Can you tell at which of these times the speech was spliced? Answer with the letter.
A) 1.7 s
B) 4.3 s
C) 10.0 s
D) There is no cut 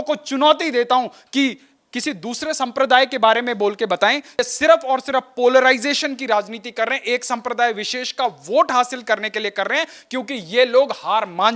B